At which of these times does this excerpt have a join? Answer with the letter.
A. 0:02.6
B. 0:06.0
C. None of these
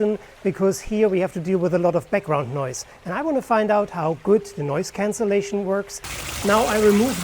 B